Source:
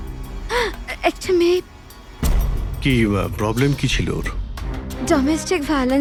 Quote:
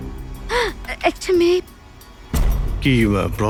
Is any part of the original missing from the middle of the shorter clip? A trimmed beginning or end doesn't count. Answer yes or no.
no